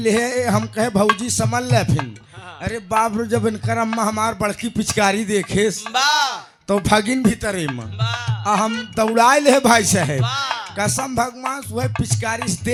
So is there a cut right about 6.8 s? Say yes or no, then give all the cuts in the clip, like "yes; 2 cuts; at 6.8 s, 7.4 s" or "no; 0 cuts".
no; 0 cuts